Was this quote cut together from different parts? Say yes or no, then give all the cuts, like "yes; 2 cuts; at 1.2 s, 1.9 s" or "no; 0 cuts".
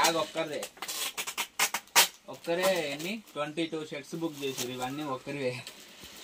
no; 0 cuts